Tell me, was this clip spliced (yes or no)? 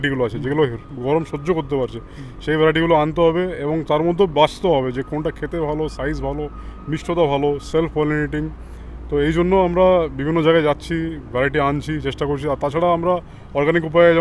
no